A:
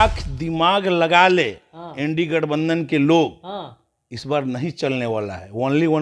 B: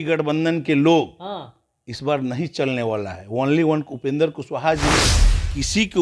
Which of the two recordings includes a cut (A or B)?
B